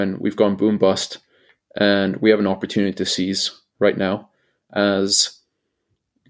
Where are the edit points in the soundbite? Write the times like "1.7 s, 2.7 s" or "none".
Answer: none